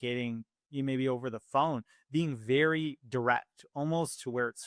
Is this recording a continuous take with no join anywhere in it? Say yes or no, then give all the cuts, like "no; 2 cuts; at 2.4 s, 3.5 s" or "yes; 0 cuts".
yes; 0 cuts